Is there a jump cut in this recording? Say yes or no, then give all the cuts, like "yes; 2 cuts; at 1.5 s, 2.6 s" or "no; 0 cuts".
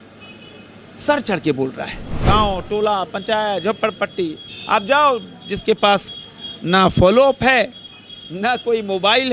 yes; 1 cut; at 2.1 s